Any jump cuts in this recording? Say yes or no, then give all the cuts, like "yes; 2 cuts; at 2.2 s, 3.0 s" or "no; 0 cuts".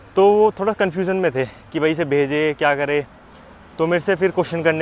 no; 0 cuts